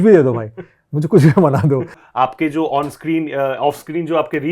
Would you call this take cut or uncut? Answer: cut